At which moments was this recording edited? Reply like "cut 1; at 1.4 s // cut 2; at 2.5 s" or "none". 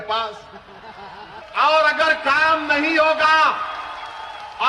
cut 1; at 1.4 s